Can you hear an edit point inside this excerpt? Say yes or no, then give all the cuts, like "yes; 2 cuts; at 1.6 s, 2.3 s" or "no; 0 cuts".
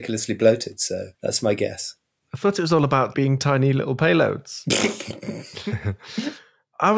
yes; 2 cuts; at 1.1 s, 3.1 s